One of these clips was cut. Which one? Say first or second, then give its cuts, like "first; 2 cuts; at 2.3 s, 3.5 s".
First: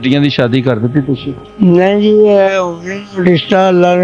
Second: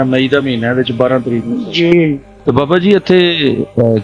second; 1 cut; at 2.3 s